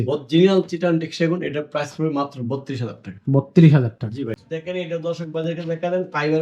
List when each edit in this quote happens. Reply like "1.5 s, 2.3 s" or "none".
4.4 s